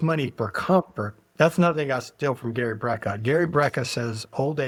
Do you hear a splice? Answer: no; 0 cuts

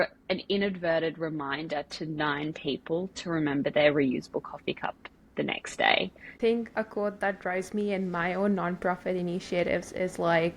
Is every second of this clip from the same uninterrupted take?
no; 1 cut; at 6.4 s

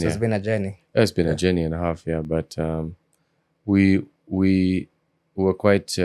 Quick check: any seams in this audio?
no; 0 cuts

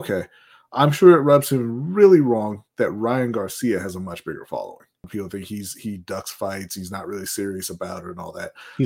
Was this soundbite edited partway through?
yes; 1 cut; at 5.1 s

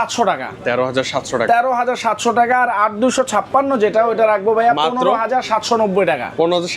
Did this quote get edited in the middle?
no; 0 cuts

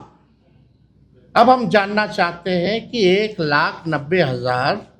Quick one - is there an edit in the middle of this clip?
no; 0 cuts

